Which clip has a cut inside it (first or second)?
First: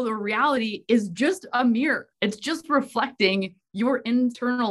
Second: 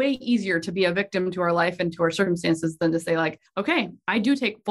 second